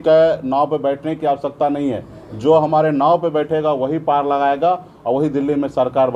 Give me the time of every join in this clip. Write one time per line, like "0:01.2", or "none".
none

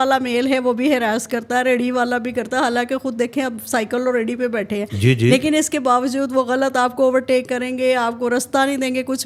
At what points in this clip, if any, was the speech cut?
none

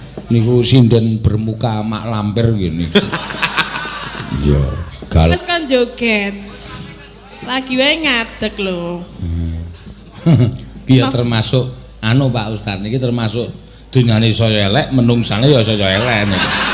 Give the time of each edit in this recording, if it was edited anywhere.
0:05.3

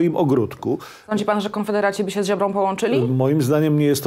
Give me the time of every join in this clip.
0:00.9

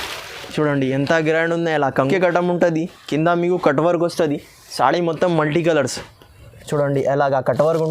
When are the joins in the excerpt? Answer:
0:02.0

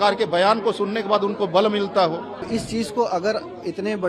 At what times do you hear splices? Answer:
0:02.4

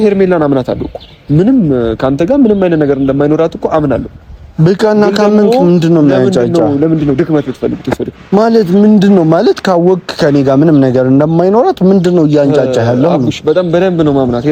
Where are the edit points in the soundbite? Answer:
none

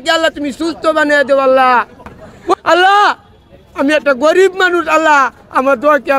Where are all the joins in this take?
0:02.5

